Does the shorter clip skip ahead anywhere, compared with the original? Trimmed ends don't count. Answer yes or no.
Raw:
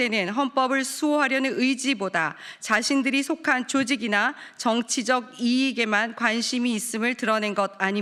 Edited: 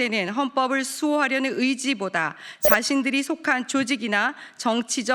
no